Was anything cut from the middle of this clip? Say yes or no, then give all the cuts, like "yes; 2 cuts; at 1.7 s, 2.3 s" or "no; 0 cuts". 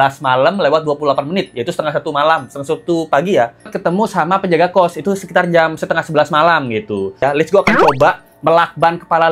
yes; 2 cuts; at 3.7 s, 7.2 s